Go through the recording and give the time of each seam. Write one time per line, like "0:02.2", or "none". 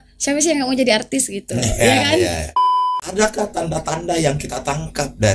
0:02.5